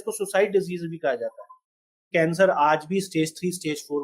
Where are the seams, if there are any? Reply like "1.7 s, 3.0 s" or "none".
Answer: 2.1 s